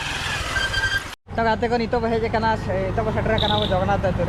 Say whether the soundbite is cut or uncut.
uncut